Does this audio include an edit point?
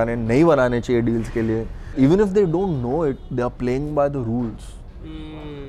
yes; 1 cut; at 1.8 s

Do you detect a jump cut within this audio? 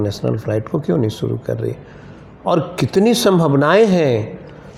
no; 0 cuts

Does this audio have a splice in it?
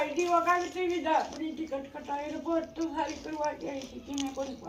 no; 0 cuts

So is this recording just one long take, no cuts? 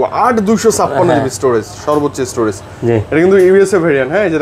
yes; 0 cuts

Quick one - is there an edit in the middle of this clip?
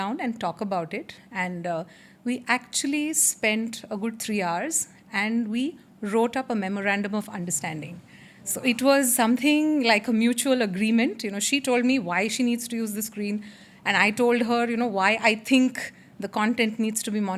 no; 0 cuts

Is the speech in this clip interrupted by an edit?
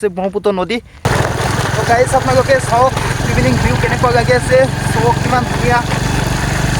yes; 1 cut; at 1.0 s

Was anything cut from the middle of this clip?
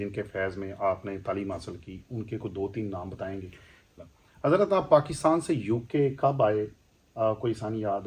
yes; 1 cut; at 4.1 s

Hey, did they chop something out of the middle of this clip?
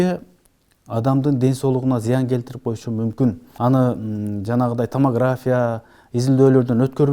yes; 1 cut; at 3.5 s

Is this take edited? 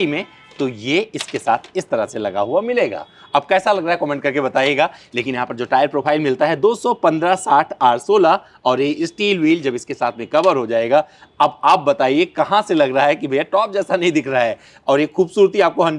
no; 0 cuts

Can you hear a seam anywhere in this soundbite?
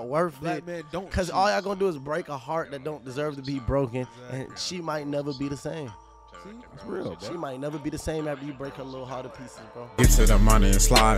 yes; 1 cut; at 9.8 s

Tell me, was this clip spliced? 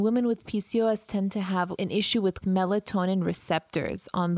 yes; 1 cut; at 1.8 s

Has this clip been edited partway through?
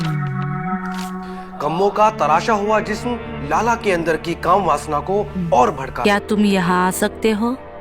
yes; 1 cut; at 6.0 s

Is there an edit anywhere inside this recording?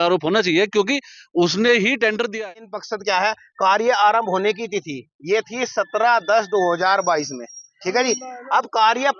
yes; 1 cut; at 2.4 s

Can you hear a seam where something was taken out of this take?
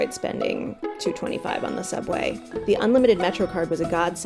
yes; 1 cut; at 2.5 s

